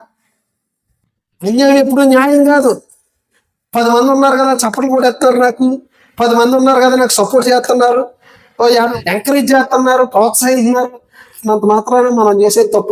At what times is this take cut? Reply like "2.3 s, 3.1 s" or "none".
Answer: 8.9 s